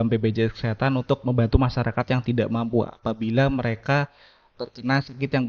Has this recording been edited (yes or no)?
no